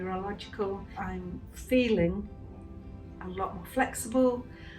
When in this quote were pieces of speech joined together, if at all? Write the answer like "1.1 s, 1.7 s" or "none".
1.0 s